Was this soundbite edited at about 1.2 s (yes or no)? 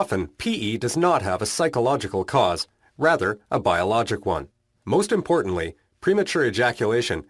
no